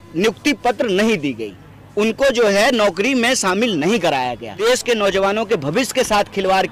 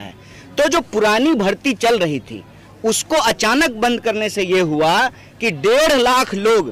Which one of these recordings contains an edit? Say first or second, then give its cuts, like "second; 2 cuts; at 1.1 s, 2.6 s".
first; 1 cut; at 4.5 s